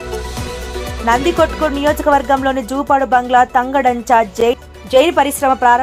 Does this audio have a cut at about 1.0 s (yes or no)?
no